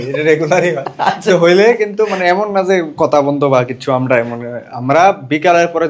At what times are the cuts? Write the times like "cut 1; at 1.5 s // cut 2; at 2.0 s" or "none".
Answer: none